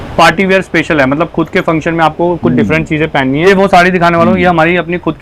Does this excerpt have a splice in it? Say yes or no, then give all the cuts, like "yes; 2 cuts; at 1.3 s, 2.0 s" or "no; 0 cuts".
yes; 1 cut; at 3.4 s